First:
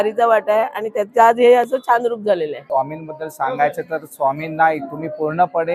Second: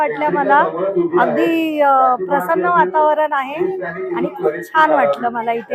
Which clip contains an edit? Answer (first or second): first